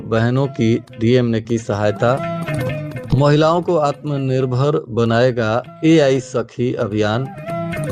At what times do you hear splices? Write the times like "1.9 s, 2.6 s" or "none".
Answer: none